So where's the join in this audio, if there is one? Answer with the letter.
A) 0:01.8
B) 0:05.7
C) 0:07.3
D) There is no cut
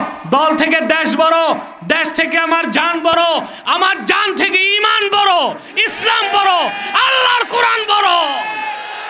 D